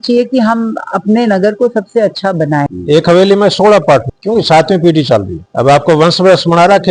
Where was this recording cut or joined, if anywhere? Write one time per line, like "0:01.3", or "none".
0:02.7
0:04.1
0:05.4